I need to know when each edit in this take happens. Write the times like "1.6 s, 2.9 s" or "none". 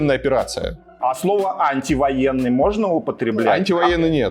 none